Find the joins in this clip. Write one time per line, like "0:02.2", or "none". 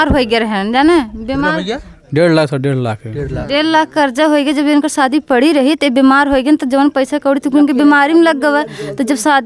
none